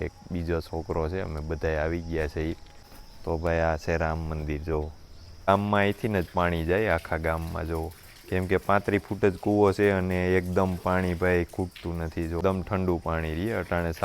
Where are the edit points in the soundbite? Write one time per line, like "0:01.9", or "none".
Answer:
0:05.5
0:12.4